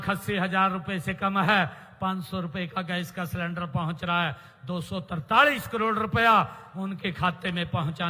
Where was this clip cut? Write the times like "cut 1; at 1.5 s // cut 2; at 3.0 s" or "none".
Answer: none